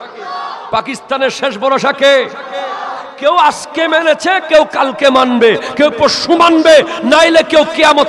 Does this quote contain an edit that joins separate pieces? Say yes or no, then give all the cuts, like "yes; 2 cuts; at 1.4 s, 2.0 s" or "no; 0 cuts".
no; 0 cuts